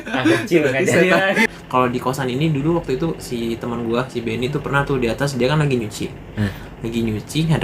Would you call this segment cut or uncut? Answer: cut